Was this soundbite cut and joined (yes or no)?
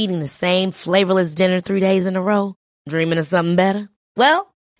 no